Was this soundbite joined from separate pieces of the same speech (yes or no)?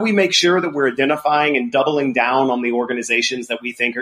no